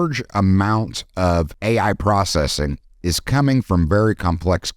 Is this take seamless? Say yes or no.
no